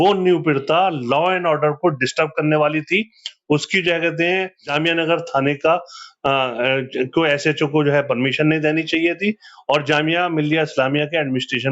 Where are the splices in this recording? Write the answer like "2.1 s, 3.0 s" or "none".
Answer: 4.7 s